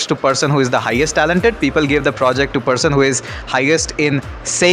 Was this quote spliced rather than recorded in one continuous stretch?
no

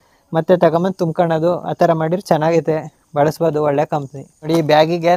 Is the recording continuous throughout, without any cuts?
yes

